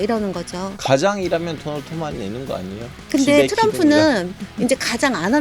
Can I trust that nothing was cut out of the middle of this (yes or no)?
yes